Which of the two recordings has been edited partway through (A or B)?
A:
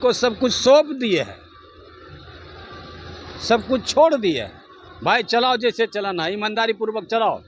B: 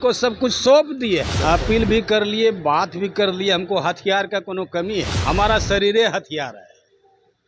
B